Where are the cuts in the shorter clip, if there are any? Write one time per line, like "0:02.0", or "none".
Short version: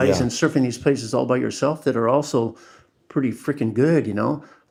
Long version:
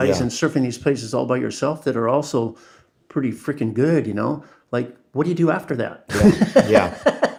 none